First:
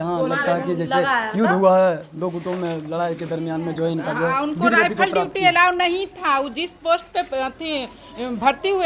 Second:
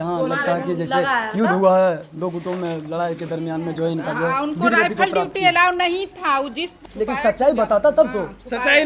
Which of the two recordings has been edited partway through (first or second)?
second